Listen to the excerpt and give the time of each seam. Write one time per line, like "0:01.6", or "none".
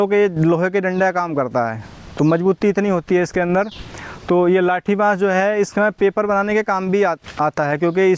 none